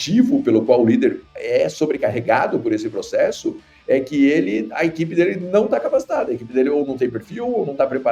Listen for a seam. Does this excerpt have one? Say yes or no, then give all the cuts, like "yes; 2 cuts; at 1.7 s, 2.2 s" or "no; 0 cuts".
yes; 1 cut; at 1.3 s